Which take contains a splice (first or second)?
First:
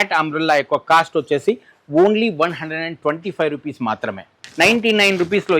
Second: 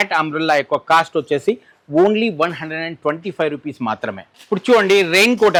first